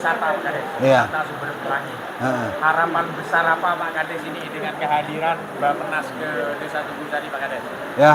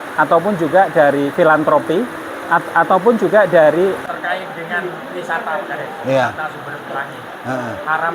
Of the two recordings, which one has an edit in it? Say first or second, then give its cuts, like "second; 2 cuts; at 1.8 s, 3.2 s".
second; 1 cut; at 4.0 s